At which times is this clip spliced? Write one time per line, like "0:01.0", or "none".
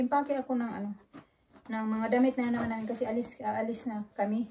none

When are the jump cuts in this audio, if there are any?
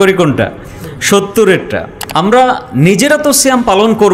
0:02.0

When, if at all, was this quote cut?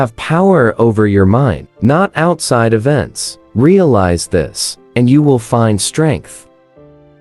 0:06.3

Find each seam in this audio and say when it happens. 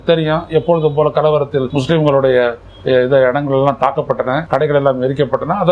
0:01.7
0:04.4

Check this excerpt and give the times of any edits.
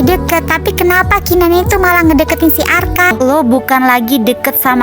0:03.1

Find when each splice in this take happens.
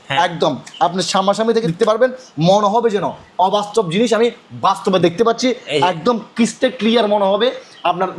0:01.7
0:05.0

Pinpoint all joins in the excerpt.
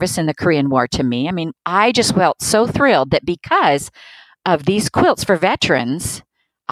0:01.5

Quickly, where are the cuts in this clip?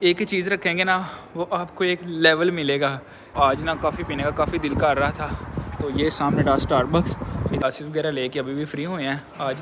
0:03.3
0:07.6

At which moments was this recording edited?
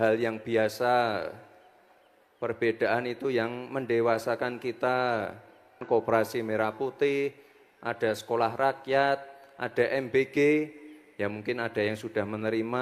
0:05.8

